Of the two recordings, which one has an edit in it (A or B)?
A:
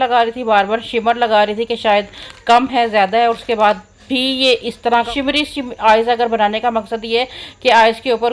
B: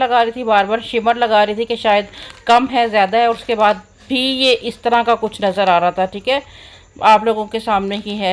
A